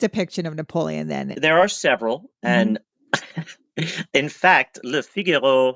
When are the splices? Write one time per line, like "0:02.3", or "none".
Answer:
0:01.3